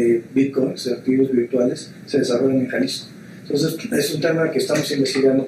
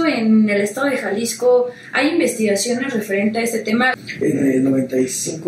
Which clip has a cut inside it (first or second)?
second